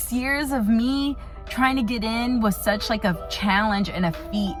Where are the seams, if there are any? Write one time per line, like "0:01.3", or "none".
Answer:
none